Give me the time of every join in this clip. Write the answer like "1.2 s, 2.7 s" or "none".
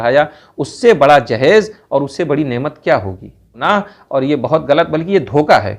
3.6 s